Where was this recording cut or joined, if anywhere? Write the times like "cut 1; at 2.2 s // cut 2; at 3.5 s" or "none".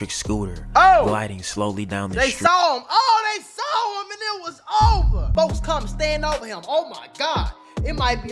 cut 1; at 5.3 s